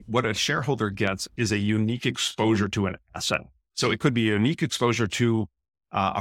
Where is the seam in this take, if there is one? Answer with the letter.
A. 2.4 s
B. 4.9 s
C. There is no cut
C